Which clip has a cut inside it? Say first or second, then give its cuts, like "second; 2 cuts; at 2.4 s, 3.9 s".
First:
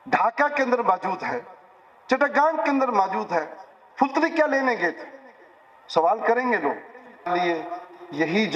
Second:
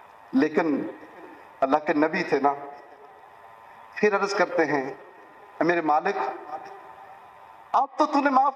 first; 1 cut; at 7.3 s